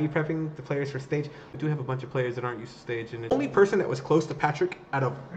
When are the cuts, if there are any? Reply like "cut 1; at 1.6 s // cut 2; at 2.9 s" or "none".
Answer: cut 1; at 1.0 s // cut 2; at 3.3 s